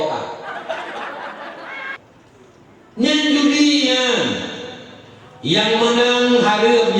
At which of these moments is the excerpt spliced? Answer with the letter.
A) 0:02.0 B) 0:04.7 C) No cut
A